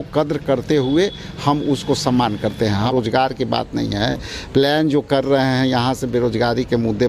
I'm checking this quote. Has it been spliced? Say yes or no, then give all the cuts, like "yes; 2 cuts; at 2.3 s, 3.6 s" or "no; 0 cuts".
yes; 1 cut; at 2.9 s